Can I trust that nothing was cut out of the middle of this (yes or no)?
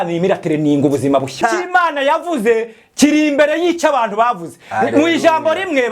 no